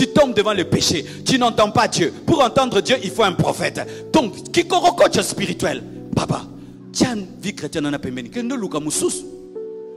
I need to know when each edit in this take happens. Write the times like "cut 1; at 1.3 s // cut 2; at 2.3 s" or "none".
none